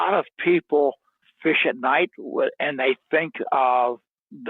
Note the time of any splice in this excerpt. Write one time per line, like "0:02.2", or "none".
none